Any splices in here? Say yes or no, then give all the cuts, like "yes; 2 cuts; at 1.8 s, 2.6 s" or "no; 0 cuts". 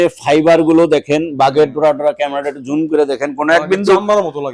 no; 0 cuts